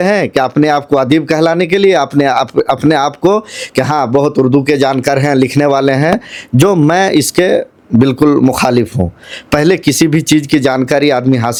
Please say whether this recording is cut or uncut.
uncut